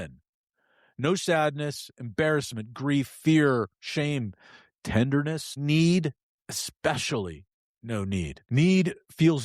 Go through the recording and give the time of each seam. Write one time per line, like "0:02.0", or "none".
0:05.5
0:08.4